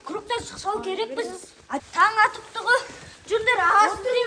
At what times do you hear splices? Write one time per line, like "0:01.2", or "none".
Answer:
0:01.8